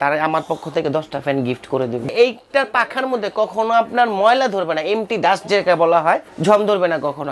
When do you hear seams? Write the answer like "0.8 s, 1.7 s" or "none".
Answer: 2.1 s, 6.3 s